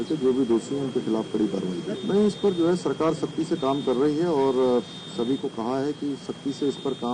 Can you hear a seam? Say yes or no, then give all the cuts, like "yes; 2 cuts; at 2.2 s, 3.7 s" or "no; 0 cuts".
yes; 1 cut; at 1.9 s